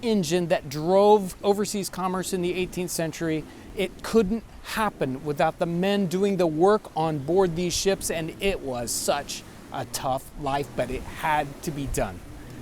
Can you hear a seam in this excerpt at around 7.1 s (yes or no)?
no